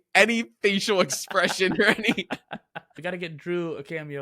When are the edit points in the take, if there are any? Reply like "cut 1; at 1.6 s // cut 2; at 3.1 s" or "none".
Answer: cut 1; at 2.9 s

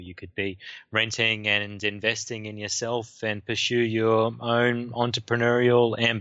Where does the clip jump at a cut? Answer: none

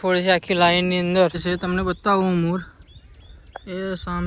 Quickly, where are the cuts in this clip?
cut 1; at 1.4 s

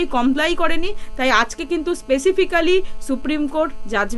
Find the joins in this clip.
none

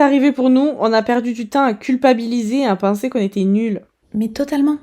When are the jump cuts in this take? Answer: cut 1; at 3.9 s

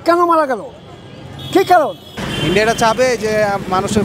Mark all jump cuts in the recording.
cut 1; at 2.1 s

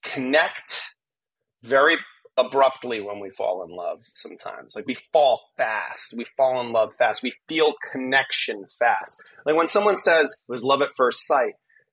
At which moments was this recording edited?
none

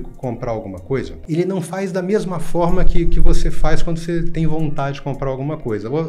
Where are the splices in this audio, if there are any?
cut 1; at 1.2 s

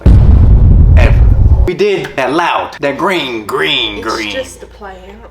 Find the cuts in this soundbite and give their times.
cut 1; at 2.2 s

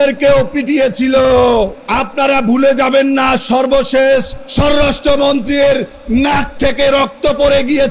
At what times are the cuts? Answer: cut 1; at 1.8 s // cut 2; at 4.4 s

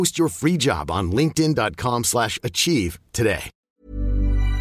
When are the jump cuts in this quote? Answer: cut 1; at 3.5 s

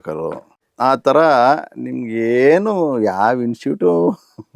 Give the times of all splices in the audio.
none

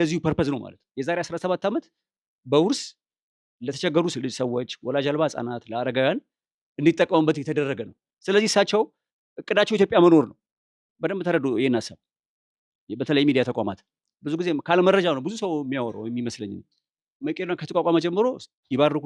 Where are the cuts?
cut 1; at 17.1 s

